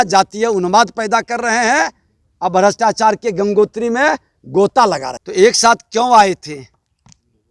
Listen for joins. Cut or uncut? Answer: cut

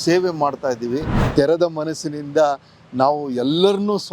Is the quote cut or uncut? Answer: cut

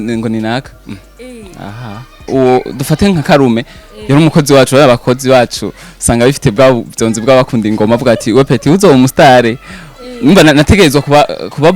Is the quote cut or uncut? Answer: cut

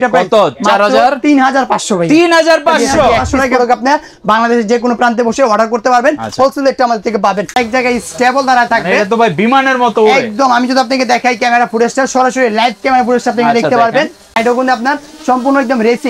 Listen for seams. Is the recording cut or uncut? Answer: cut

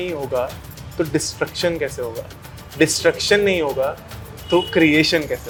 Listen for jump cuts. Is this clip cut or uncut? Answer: uncut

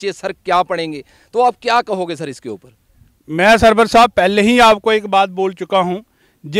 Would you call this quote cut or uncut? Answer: uncut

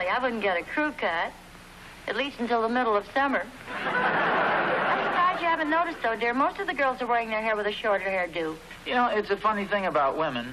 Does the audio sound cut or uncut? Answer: cut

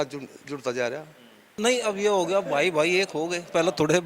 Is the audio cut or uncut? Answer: cut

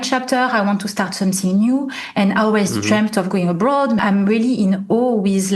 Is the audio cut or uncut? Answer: cut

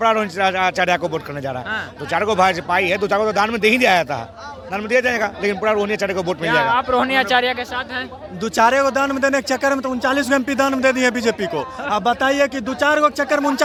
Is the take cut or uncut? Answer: uncut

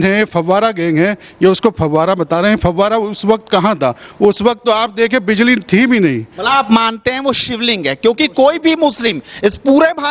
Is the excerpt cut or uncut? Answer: uncut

